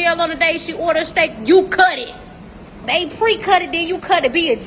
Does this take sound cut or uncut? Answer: cut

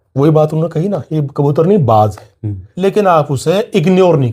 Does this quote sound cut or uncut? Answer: cut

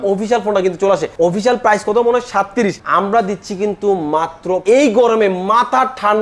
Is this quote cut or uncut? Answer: cut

